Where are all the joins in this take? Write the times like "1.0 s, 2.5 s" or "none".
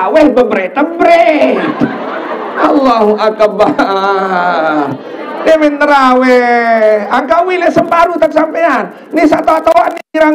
none